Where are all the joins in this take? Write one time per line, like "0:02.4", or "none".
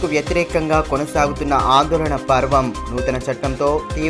none

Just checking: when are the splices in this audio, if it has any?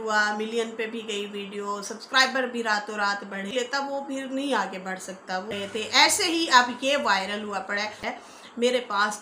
0:03.5
0:05.5
0:08.0

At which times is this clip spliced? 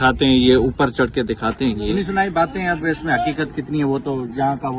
0:01.9

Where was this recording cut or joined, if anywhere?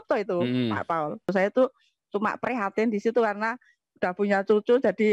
0:01.3

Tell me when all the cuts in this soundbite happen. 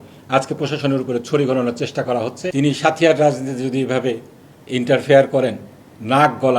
0:02.4

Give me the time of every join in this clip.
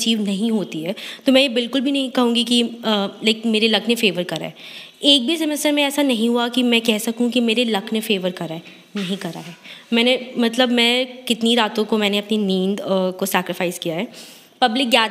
none

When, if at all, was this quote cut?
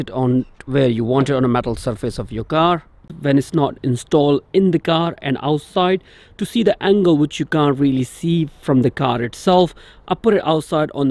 0:03.1

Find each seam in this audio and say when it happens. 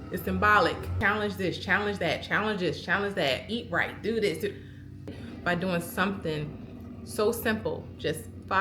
0:01.0
0:05.1

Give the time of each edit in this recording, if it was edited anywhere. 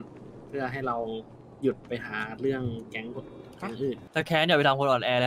0:04.0

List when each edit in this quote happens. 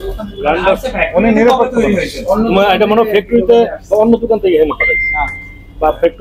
none

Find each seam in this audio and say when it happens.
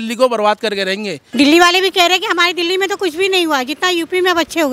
0:01.2

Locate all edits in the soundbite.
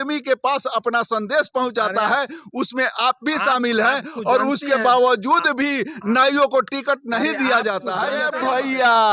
0:08.2

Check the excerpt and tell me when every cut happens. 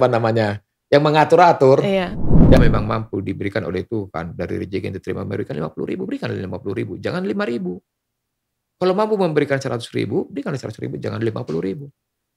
0:02.6

